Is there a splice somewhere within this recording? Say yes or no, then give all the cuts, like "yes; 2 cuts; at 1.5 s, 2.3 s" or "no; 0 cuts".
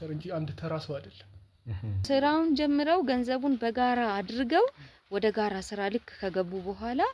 yes; 1 cut; at 2.0 s